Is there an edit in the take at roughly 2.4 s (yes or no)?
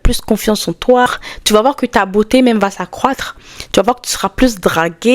no